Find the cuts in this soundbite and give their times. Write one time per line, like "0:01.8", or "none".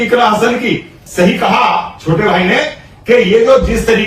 0:00.9